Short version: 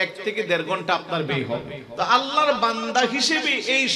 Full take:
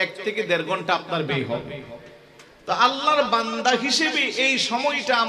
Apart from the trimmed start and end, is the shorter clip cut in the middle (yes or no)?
yes